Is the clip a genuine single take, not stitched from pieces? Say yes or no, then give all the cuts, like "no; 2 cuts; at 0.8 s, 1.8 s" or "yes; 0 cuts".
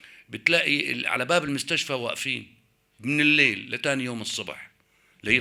yes; 0 cuts